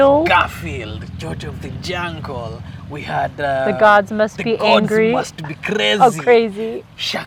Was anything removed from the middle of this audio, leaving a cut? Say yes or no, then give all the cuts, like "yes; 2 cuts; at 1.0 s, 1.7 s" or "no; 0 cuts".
no; 0 cuts